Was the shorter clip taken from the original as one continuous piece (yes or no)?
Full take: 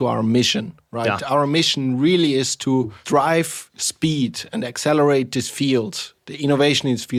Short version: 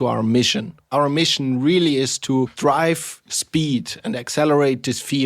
no